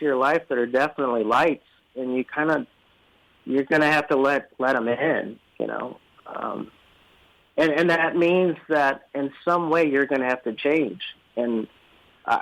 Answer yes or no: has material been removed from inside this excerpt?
no